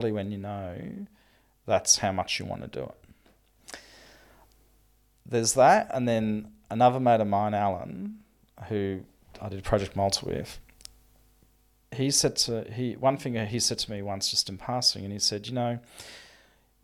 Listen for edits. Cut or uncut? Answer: uncut